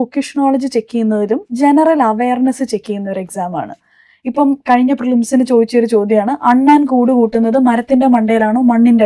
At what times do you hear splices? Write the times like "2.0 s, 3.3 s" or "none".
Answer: none